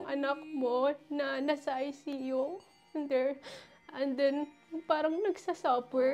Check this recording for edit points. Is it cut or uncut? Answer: uncut